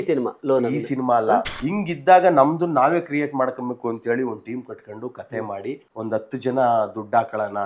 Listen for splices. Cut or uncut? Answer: cut